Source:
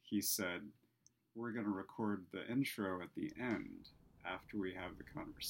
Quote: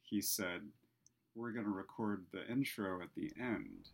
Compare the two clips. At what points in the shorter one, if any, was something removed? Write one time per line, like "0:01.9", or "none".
none